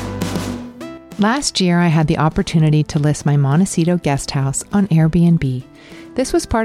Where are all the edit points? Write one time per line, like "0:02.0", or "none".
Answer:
0:01.0